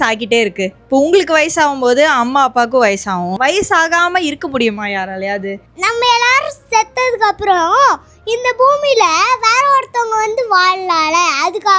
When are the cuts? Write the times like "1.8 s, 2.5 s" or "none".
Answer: 3.4 s, 5.7 s